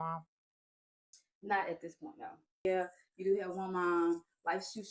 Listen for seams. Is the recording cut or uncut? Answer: cut